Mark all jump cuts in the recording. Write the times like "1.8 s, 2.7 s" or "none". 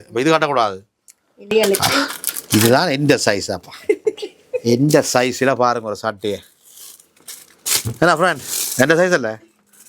1.5 s